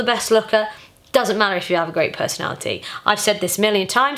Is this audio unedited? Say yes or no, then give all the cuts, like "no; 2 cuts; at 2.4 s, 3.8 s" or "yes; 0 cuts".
yes; 0 cuts